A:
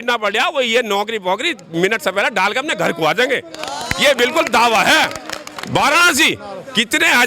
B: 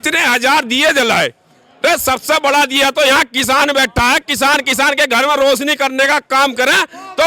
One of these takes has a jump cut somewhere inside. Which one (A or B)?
A